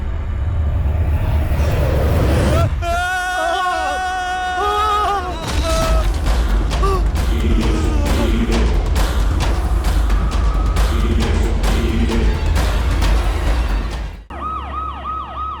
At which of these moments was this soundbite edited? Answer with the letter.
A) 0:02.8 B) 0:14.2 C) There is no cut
B